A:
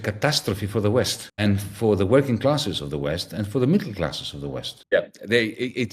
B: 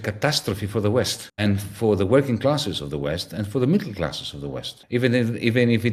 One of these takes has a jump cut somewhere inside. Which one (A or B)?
A